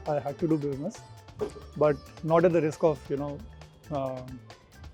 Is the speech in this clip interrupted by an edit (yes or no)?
no